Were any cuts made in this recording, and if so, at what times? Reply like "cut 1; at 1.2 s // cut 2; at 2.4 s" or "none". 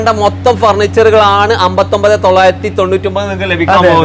none